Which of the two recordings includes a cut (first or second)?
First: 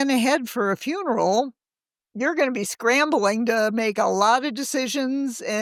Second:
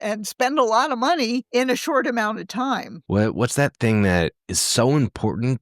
second